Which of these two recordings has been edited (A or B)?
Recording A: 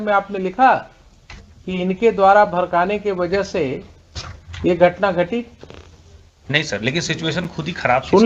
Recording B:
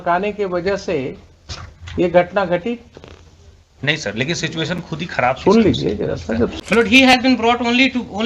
B